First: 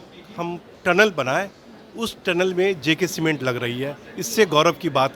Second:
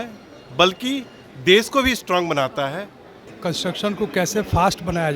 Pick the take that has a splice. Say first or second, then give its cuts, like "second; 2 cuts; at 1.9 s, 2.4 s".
second; 1 cut; at 3.3 s